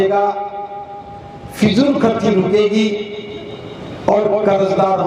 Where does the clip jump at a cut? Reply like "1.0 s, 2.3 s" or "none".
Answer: none